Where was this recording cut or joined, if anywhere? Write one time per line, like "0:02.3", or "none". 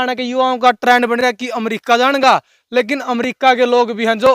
none

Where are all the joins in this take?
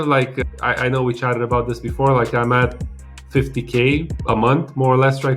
none

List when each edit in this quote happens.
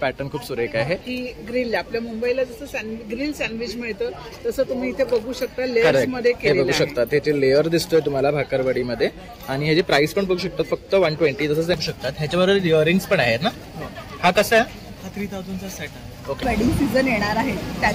0:01.1
0:11.8
0:16.4

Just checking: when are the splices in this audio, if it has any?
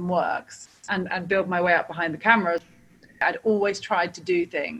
0:02.7

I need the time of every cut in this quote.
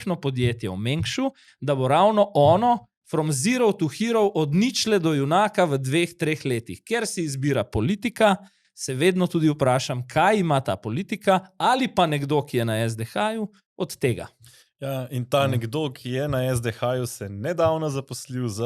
none

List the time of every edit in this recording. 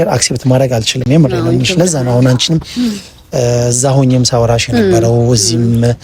none

